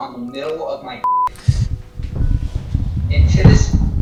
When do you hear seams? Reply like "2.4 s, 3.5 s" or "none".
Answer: none